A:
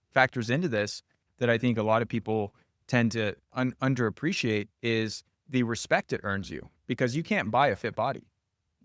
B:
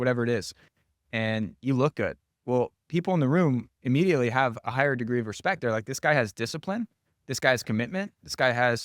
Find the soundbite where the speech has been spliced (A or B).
B